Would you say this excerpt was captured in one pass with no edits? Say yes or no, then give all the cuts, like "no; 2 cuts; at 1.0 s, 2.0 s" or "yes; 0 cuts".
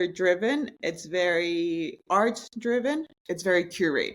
no; 1 cut; at 3.2 s